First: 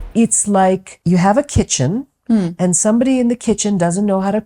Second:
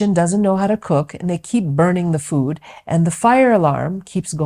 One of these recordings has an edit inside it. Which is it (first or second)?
first